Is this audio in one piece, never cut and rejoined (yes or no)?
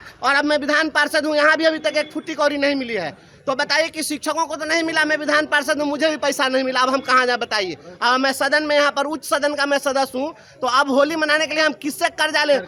yes